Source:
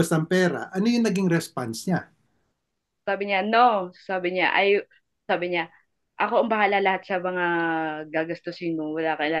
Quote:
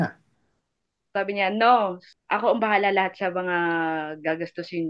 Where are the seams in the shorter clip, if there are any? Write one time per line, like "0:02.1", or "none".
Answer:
0:02.1